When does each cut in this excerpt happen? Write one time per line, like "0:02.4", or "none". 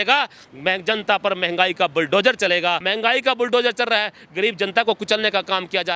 0:02.9